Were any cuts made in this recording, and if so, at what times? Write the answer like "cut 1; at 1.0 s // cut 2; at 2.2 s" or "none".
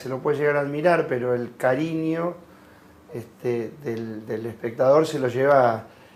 none